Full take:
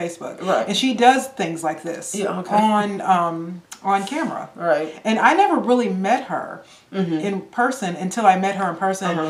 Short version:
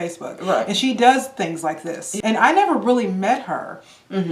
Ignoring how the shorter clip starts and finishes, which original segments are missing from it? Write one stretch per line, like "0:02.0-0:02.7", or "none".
0:02.1-0:04.9